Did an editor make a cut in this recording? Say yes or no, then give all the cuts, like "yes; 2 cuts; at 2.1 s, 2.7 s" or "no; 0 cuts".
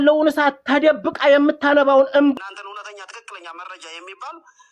yes; 1 cut; at 2.3 s